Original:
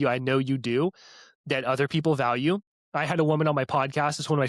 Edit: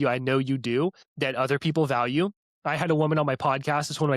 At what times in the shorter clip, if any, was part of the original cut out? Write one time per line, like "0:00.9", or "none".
0:01.1